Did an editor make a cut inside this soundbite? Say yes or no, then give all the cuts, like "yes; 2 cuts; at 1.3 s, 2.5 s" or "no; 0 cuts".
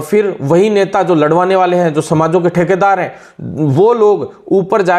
no; 0 cuts